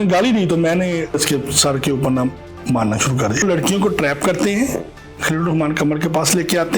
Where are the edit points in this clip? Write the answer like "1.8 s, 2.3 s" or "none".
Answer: 1.2 s, 3.4 s